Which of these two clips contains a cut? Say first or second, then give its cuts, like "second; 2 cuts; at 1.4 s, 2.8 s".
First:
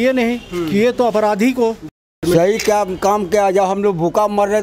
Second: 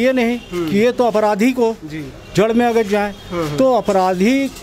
first; 1 cut; at 2.2 s